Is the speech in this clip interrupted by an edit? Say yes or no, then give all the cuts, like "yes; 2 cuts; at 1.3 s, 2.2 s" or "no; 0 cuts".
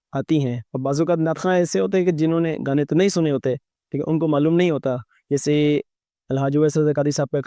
no; 0 cuts